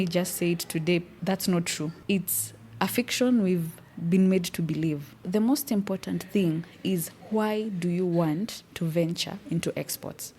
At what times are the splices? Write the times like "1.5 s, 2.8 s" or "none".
1.1 s, 2.0 s, 5.2 s